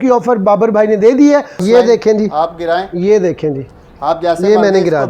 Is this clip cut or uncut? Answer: cut